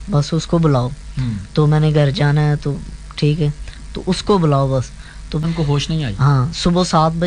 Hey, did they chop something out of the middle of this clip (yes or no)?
yes